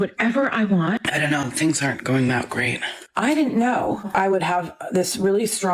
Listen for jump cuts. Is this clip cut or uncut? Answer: cut